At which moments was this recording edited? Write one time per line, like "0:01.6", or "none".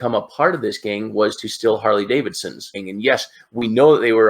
0:02.8